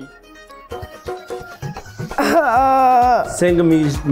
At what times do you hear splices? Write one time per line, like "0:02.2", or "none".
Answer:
none